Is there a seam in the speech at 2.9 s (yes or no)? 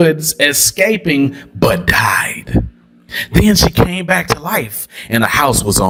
no